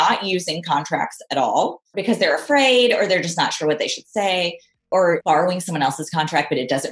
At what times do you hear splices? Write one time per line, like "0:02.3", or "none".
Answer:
0:02.0
0:05.2